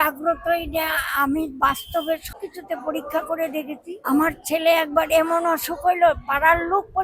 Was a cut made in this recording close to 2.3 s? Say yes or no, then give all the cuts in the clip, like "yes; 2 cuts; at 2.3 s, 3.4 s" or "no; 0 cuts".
yes; 2 cuts; at 2.3 s, 4.0 s